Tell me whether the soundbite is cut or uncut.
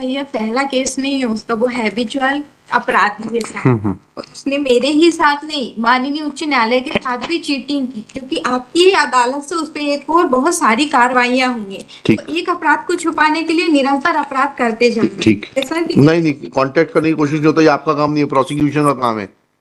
cut